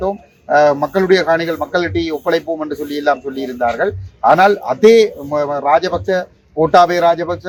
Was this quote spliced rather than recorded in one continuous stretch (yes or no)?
no